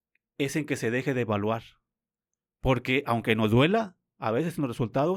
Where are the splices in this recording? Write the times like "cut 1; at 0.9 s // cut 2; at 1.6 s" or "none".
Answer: none